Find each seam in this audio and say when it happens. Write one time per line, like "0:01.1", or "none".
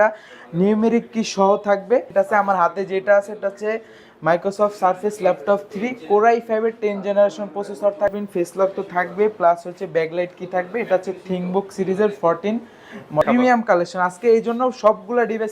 0:02.1
0:08.2
0:13.2